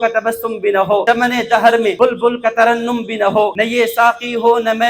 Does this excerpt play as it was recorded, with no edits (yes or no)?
no